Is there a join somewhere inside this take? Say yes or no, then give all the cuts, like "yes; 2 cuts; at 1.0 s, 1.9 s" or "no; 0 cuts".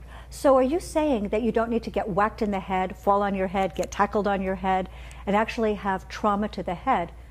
yes; 1 cut; at 3.4 s